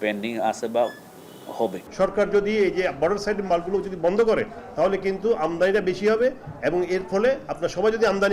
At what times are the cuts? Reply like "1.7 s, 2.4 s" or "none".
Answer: 1.8 s